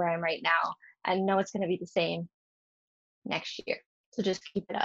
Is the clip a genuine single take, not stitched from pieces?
yes; 0 cuts

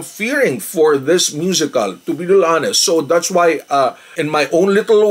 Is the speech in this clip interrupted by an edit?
no; 0 cuts

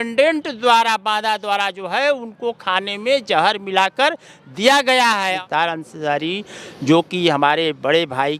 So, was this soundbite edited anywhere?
no; 0 cuts

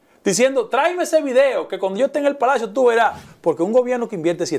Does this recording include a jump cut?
yes; 1 cut; at 3.2 s

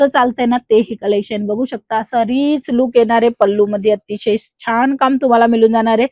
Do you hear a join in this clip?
no; 0 cuts

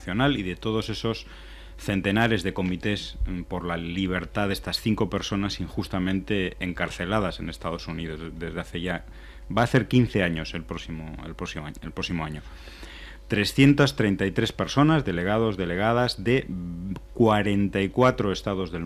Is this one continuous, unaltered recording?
no; 1 cut; at 5.9 s

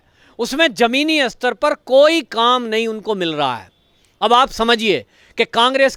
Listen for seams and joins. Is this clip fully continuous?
yes; 0 cuts

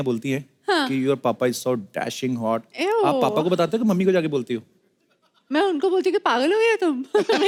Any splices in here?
no; 0 cuts

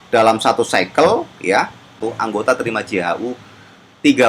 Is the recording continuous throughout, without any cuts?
no; 1 cut; at 2.0 s

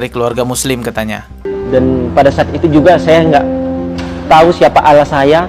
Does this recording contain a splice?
no; 0 cuts

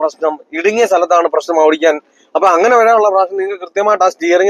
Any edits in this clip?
no; 0 cuts

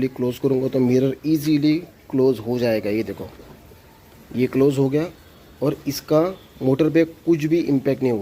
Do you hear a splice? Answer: no; 0 cuts

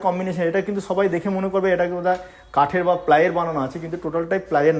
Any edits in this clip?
no; 0 cuts

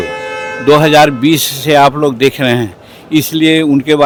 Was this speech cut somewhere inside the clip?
no; 0 cuts

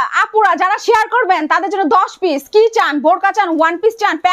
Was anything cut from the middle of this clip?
no; 0 cuts

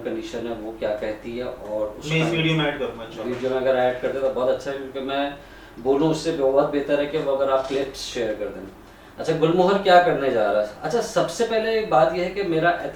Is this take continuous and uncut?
yes; 0 cuts

